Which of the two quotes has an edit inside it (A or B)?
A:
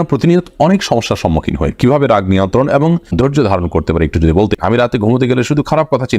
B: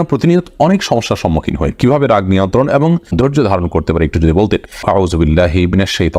A